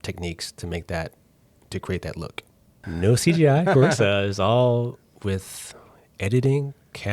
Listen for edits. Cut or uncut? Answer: cut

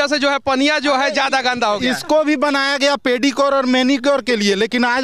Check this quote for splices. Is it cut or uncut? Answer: uncut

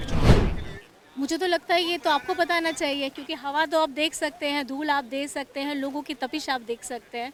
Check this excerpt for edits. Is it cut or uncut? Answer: uncut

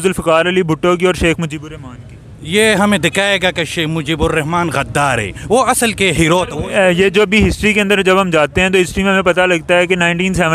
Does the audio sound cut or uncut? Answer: cut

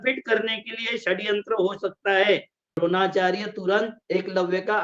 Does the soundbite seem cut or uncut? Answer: cut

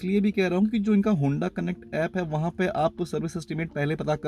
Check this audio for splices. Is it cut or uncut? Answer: uncut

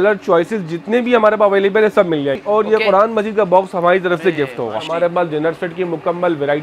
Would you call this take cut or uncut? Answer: cut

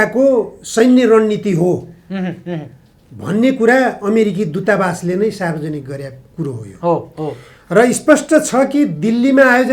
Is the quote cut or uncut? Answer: uncut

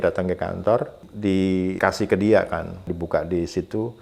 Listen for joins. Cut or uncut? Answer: cut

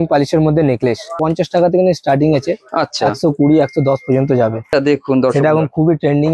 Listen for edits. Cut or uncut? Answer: cut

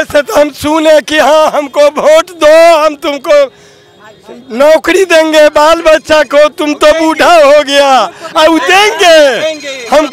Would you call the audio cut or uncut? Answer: uncut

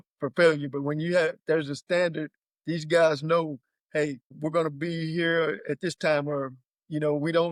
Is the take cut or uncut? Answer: uncut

